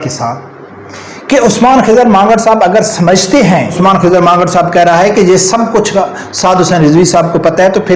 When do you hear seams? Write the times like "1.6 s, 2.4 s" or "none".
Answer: 3.8 s